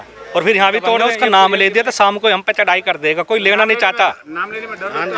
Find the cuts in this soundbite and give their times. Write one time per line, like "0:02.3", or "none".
0:01.1